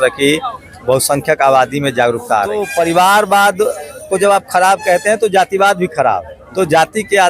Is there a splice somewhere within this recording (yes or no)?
yes